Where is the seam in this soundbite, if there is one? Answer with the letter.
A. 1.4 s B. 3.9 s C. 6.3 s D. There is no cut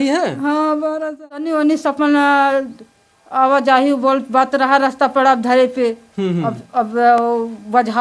A